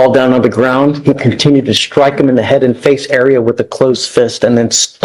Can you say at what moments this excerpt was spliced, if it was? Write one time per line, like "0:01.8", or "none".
none